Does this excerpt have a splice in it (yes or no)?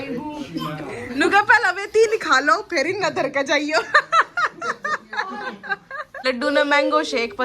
yes